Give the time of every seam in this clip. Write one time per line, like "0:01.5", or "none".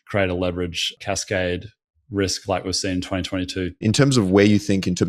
0:00.9
0:03.8